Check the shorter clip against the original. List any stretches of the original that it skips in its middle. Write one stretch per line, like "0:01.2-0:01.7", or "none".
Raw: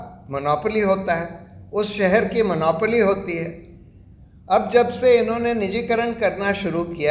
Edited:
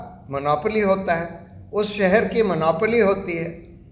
none